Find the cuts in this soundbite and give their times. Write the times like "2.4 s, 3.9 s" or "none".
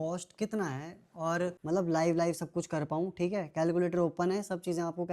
1.6 s